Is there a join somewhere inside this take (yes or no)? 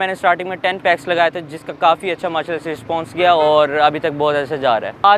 no